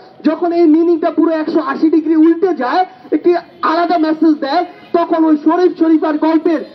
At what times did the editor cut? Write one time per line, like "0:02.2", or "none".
none